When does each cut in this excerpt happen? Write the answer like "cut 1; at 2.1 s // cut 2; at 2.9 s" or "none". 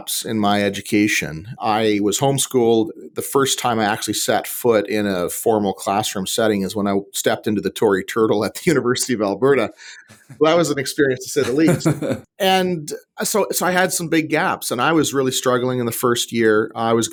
none